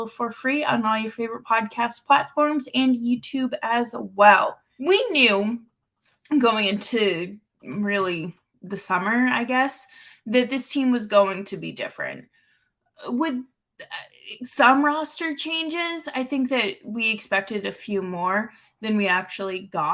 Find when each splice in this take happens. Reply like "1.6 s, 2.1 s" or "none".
4.7 s